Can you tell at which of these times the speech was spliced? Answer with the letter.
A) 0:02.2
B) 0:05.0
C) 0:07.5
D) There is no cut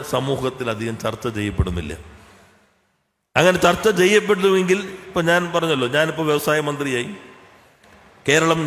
D